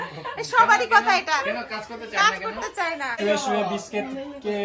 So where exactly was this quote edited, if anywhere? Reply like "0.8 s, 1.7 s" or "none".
3.2 s